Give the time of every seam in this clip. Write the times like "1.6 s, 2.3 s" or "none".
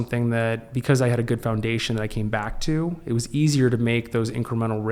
none